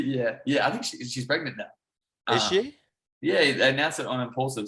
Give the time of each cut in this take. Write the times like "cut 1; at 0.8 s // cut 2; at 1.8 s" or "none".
none